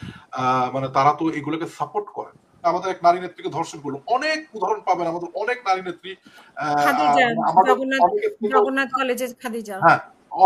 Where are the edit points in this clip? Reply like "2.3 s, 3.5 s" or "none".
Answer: 2.7 s